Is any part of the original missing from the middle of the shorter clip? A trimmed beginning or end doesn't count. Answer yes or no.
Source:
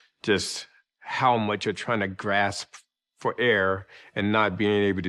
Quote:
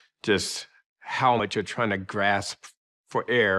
yes